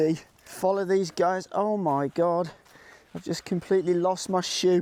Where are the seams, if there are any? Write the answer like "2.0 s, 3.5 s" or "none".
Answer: none